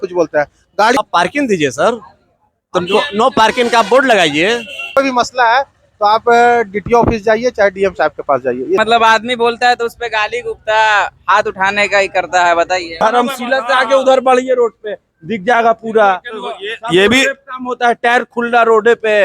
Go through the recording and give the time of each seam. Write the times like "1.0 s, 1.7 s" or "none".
1.0 s, 5.0 s, 8.8 s, 12.9 s